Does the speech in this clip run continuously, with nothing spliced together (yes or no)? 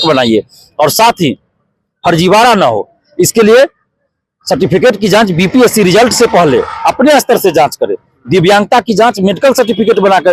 yes